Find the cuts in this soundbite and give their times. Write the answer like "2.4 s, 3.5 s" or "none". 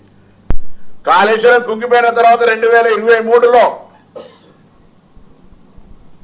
none